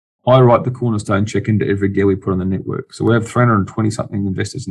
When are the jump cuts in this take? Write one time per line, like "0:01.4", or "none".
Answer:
none

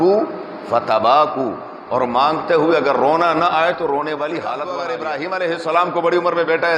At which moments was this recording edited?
0:04.9

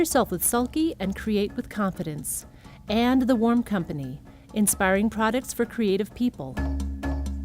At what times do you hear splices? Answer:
0:06.5

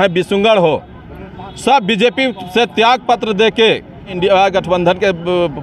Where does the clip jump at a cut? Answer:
0:04.1

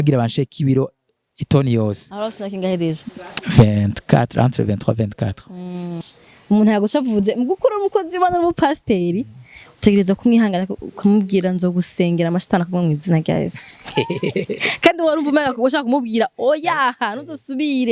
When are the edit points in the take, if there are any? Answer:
0:06.0

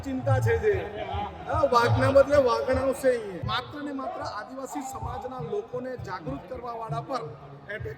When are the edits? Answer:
0:03.4

